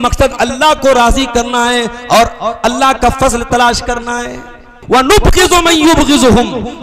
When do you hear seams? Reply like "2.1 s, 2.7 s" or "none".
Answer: 4.7 s